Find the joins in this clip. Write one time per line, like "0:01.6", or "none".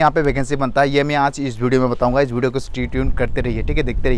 none